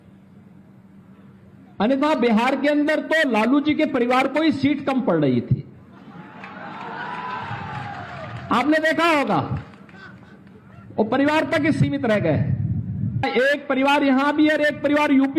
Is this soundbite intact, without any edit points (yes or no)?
no